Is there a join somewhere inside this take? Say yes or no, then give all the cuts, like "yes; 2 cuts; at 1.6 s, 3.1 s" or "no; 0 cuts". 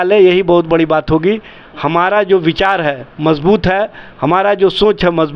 no; 0 cuts